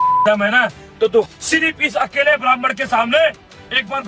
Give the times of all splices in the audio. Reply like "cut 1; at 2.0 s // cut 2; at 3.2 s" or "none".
cut 1; at 1.3 s